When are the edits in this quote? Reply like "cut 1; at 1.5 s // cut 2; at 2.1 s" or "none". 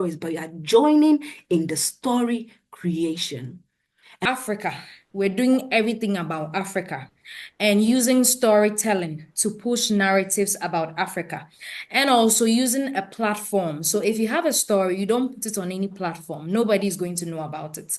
cut 1; at 4.2 s